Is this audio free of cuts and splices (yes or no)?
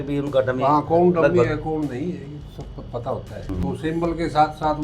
no